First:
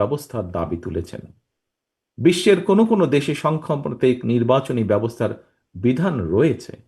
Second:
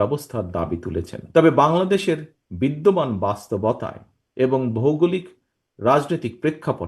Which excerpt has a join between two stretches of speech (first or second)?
second